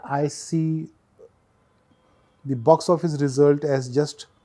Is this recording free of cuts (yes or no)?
yes